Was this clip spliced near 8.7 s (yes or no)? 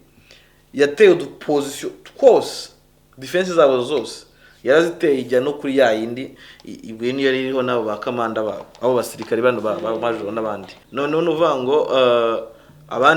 no